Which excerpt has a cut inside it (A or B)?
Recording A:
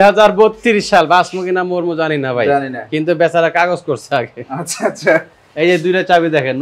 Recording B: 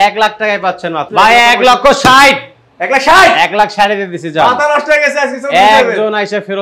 B